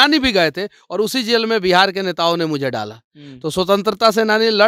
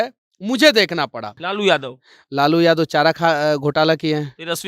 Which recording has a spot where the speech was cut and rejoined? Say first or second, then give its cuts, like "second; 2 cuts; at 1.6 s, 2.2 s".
second; 1 cut; at 1.4 s